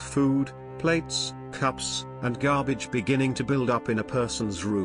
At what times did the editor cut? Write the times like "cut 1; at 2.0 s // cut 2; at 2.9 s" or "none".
none